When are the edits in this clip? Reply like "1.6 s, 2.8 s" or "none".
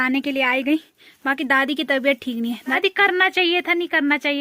2.8 s

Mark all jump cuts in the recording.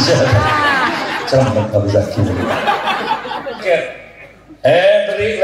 3.6 s

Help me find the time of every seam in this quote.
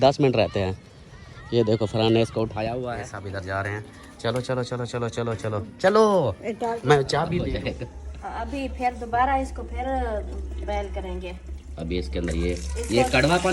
3.1 s, 7.5 s

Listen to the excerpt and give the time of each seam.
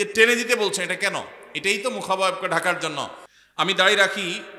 3.2 s

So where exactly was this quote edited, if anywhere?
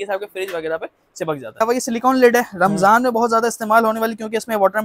1.6 s

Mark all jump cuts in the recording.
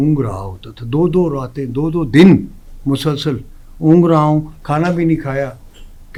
none

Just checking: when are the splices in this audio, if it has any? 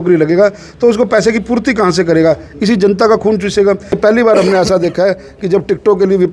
4.0 s

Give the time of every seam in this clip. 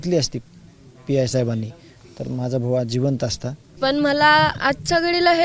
3.7 s

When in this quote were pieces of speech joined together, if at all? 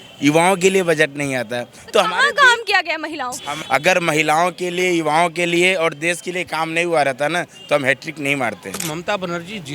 3.5 s, 8.9 s

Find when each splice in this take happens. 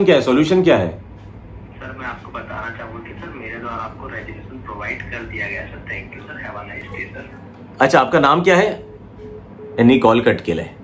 none

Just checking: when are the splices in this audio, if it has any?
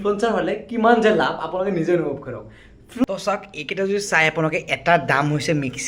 3.0 s

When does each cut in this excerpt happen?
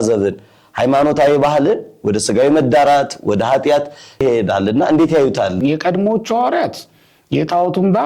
5.6 s

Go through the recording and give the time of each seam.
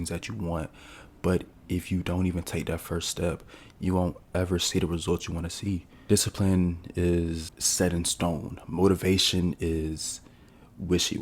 5.9 s, 7.6 s

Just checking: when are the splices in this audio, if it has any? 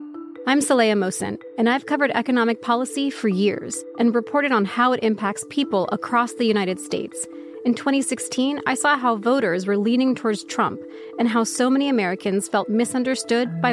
none

